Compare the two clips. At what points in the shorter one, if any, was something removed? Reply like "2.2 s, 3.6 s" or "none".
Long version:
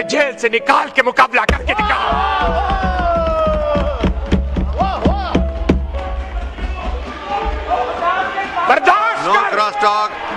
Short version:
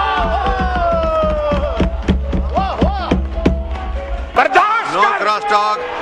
4.3 s